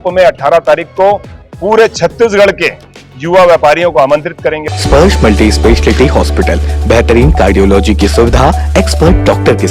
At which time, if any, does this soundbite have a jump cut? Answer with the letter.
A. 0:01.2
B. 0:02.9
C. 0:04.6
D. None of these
C